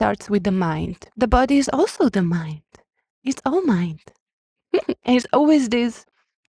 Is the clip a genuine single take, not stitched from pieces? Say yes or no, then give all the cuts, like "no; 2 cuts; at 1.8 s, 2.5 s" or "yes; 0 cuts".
no; 2 cuts; at 1.0 s, 4.9 s